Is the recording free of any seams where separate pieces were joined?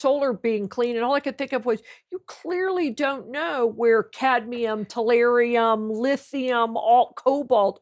yes; 0 cuts

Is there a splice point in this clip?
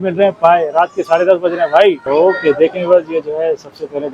yes; 1 cut; at 2.0 s

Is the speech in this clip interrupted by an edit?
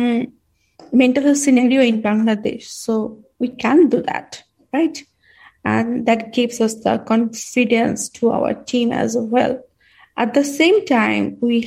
no; 0 cuts

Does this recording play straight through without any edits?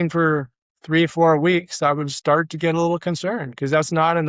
yes; 0 cuts

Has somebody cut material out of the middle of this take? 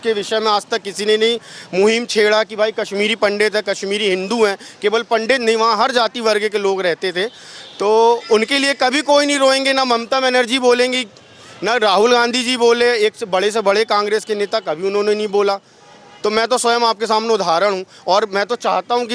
no; 0 cuts

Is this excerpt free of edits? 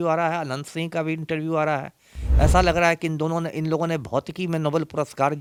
yes; 0 cuts

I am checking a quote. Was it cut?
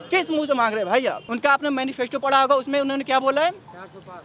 yes; 1 cut; at 1.3 s

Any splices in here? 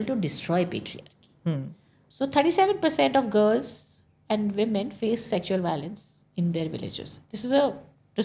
yes; 1 cut; at 2.1 s

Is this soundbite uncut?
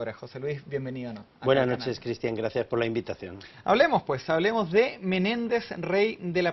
no; 1 cut; at 2.3 s

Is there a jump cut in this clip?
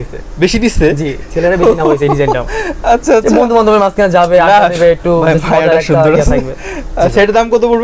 no; 0 cuts

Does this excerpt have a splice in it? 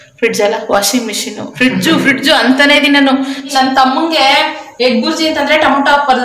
yes; 1 cut; at 3.4 s

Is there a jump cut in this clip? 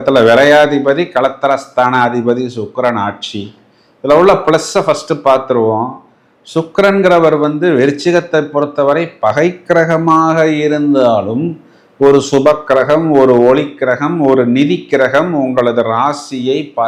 no; 0 cuts

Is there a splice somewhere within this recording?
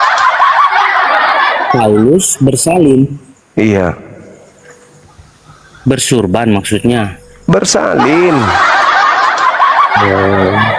yes; 1 cut; at 1.2 s

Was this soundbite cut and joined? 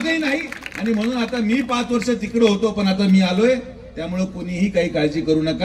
no; 0 cuts

